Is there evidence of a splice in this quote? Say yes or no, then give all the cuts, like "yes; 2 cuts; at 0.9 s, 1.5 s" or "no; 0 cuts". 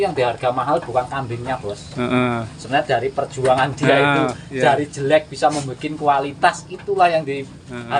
no; 0 cuts